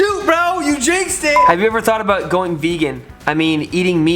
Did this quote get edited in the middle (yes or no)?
yes